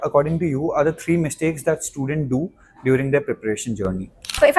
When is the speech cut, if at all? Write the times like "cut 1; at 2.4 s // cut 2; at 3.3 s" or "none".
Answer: none